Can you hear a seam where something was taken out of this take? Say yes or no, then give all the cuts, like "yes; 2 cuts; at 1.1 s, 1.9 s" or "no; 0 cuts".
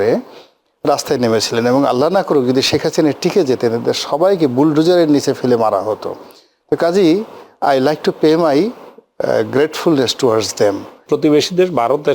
yes; 1 cut; at 10.9 s